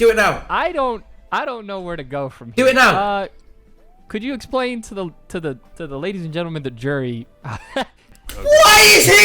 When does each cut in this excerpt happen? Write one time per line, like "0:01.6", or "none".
0:08.0